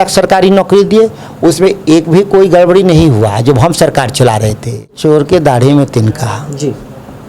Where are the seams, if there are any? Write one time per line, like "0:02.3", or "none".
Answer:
0:05.0